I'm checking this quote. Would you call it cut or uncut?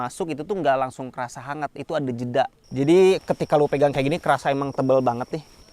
cut